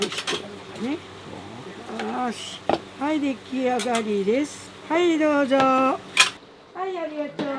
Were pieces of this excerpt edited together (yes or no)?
no